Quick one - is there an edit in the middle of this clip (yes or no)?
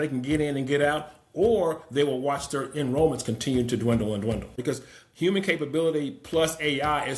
yes